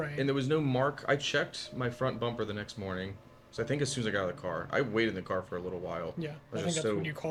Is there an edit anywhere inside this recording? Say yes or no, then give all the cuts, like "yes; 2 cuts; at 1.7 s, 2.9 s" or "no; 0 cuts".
no; 0 cuts